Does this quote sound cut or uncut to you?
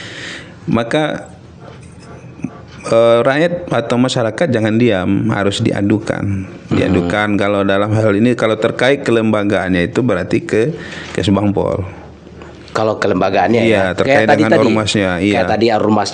uncut